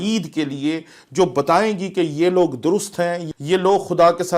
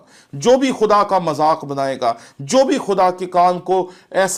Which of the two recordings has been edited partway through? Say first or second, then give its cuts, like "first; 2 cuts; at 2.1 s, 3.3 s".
first; 1 cut; at 3.2 s